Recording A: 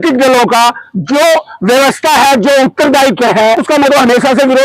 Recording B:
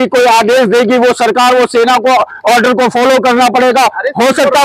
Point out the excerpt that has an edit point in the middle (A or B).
A